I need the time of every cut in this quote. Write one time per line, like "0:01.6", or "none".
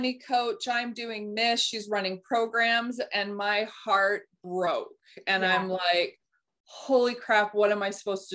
none